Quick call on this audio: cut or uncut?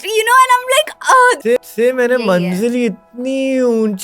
cut